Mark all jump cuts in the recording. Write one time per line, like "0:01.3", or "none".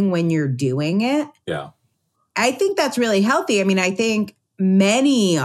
0:04.4